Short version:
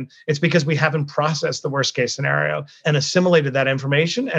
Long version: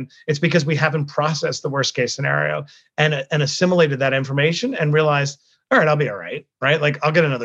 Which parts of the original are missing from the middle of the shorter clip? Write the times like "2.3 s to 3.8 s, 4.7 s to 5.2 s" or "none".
2.8 s to 3.2 s